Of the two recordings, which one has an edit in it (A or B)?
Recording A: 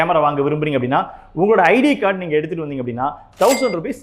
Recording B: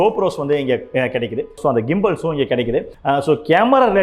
B